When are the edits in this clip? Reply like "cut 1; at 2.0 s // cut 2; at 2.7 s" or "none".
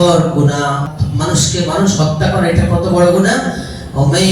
cut 1; at 0.9 s